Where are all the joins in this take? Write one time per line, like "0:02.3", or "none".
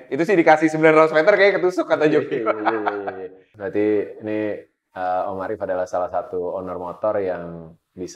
0:03.5